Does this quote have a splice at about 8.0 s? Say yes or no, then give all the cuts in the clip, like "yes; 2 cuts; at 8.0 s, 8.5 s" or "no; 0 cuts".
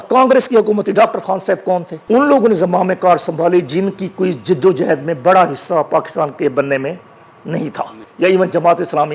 yes; 2 cuts; at 1.9 s, 8.0 s